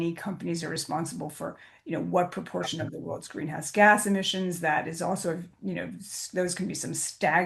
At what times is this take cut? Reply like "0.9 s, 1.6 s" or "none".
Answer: none